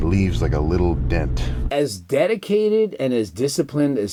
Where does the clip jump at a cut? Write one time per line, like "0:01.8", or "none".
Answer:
none